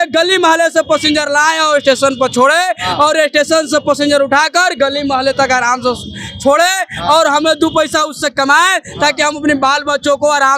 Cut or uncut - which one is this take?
uncut